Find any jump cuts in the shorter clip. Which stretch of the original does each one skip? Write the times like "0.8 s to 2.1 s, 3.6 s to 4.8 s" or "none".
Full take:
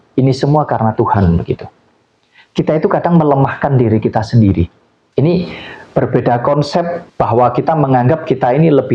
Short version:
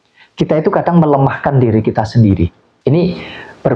4.8 s to 5.0 s